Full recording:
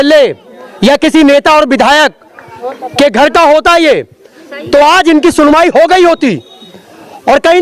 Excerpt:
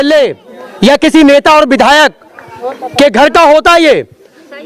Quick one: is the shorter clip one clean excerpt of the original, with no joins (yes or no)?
yes